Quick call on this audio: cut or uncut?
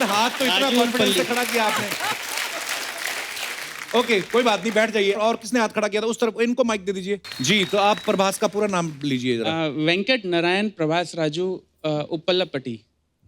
cut